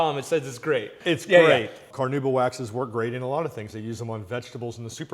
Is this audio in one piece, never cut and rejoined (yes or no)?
no